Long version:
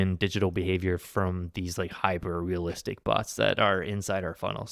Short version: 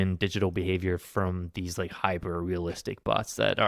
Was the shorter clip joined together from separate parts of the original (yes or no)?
no